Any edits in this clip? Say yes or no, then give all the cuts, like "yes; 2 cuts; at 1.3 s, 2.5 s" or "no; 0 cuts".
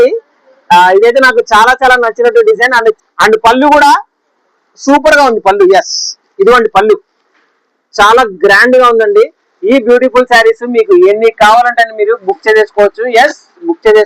yes; 1 cut; at 3.0 s